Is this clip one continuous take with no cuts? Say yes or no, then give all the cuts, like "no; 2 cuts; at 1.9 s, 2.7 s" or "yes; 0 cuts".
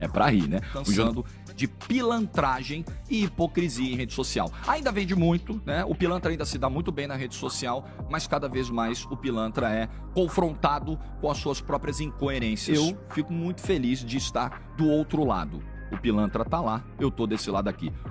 no; 2 cuts; at 1.0 s, 12.6 s